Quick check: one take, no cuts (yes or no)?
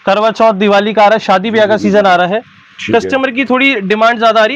yes